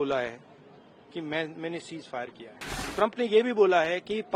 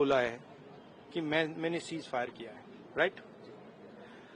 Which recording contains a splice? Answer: first; 1 cut; at 2.7 s

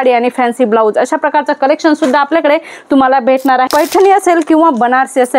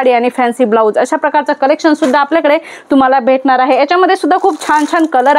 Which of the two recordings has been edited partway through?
first; 1 cut; at 3.7 s

